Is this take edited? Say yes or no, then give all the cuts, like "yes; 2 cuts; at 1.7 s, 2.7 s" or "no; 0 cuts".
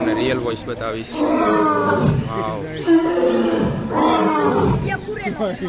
no; 0 cuts